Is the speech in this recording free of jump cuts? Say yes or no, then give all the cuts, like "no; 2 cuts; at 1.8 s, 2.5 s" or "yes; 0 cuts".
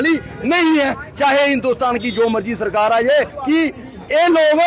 no; 1 cut; at 3.4 s